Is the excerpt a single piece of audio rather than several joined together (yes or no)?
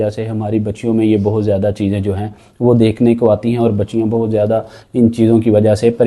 yes